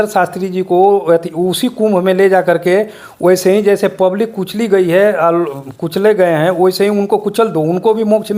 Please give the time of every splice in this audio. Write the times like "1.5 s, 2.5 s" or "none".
none